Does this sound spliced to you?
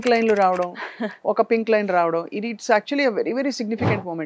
no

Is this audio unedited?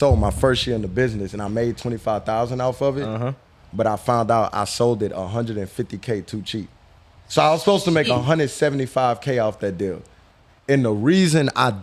yes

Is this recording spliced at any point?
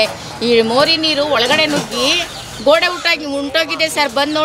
no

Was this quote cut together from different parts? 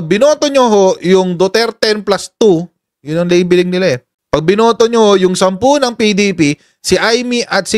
no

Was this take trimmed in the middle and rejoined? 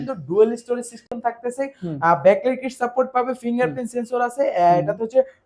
no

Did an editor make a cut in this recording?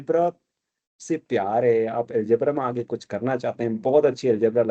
no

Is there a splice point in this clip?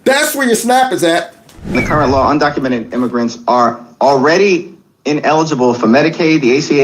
yes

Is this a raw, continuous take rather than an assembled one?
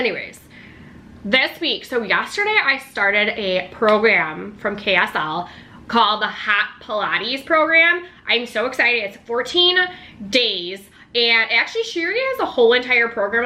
yes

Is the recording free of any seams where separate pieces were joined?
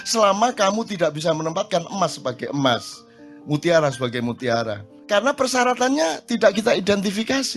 no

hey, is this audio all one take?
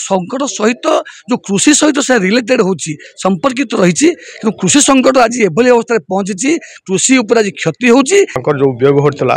no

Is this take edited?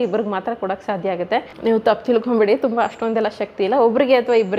no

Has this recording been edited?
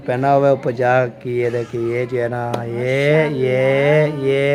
no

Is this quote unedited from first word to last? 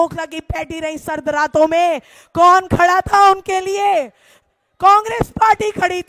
yes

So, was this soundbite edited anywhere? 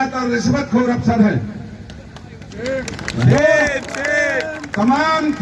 no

